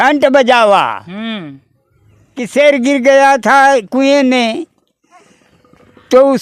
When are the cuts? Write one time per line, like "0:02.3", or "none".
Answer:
0:02.5